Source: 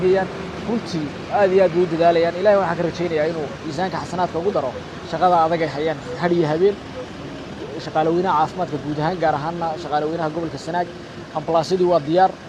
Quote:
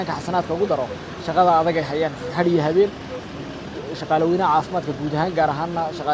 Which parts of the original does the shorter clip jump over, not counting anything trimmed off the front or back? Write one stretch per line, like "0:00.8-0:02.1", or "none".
none